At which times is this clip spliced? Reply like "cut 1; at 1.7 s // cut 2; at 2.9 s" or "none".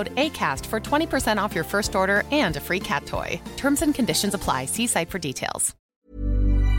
cut 1; at 5.7 s